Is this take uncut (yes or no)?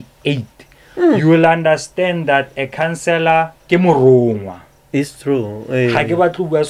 yes